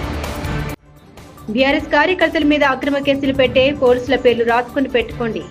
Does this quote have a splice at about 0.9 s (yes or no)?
yes